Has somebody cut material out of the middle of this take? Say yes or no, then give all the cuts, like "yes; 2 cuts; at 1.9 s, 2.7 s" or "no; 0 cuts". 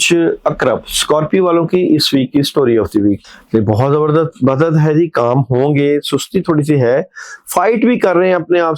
yes; 1 cut; at 3.2 s